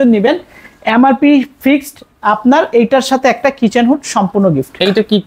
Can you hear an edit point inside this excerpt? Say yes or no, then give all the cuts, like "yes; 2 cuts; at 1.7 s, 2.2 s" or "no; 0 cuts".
no; 0 cuts